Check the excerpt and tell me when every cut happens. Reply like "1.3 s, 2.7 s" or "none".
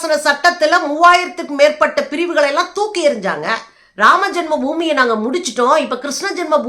3.8 s